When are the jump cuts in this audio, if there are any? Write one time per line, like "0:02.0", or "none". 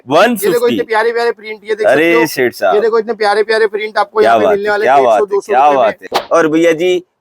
0:06.1